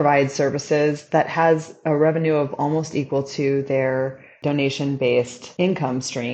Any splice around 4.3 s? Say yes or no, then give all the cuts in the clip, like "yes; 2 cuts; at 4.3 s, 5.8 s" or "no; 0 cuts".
yes; 2 cuts; at 4.3 s, 5.4 s